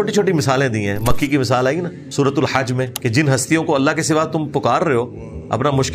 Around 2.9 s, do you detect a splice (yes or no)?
yes